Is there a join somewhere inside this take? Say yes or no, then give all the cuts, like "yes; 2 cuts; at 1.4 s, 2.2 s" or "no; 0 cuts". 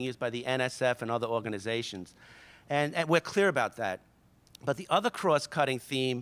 no; 0 cuts